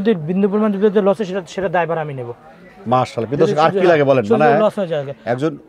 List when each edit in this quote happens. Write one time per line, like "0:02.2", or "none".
none